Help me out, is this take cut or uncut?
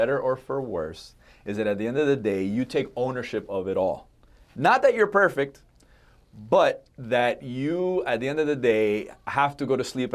uncut